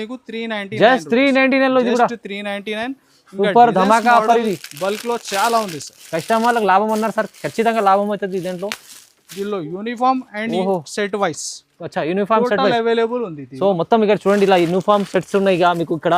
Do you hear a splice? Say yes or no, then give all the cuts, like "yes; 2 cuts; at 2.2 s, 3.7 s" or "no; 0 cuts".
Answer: no; 0 cuts